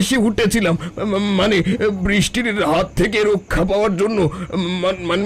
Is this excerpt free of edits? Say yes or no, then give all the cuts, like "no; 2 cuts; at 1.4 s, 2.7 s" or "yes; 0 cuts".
yes; 0 cuts